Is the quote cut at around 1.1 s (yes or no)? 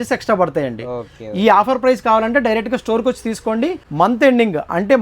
no